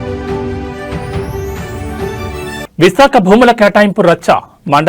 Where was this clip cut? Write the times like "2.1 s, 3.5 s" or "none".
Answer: 2.6 s